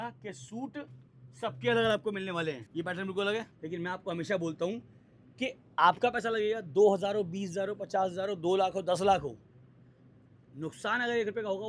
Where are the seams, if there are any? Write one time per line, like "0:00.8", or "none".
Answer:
0:02.6
0:03.6